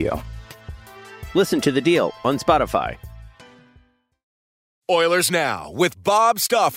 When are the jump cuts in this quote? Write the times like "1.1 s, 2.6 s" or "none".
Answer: 4.6 s